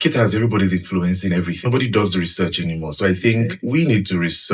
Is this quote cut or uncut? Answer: cut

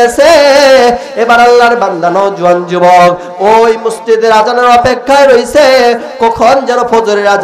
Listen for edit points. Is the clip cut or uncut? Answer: uncut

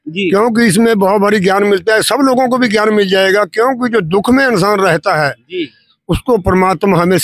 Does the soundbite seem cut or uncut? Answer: uncut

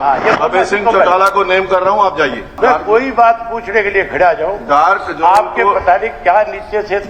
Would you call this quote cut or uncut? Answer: cut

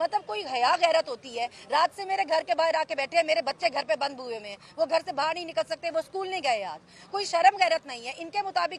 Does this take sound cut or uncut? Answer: uncut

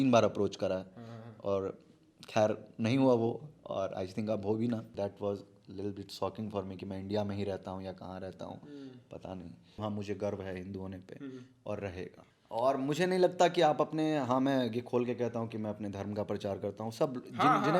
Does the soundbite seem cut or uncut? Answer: cut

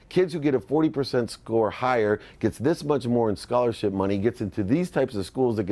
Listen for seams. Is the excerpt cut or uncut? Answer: uncut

